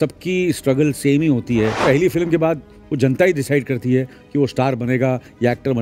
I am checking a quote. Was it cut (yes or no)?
yes